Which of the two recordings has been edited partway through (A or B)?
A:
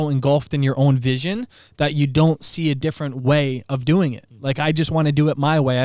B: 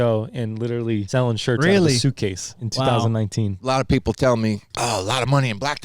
B